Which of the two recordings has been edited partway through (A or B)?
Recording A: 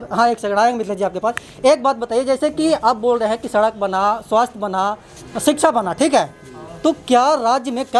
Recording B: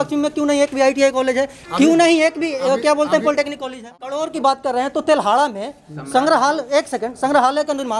B